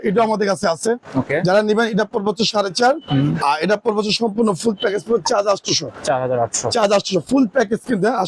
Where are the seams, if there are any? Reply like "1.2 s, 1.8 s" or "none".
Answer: none